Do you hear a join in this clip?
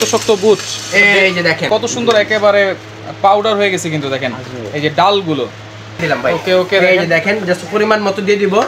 yes; 2 cuts; at 1.7 s, 6.0 s

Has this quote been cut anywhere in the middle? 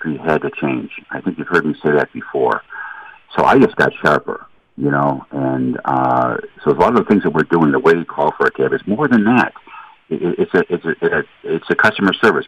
no; 0 cuts

